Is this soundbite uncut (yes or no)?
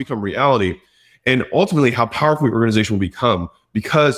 yes